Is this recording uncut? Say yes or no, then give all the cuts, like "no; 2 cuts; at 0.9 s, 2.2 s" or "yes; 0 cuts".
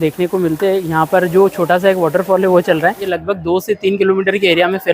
no; 1 cut; at 3.1 s